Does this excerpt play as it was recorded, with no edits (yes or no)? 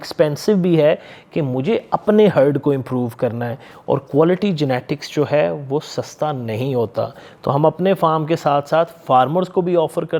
yes